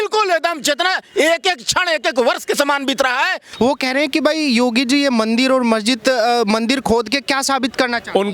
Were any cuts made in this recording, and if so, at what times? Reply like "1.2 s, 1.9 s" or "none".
3.5 s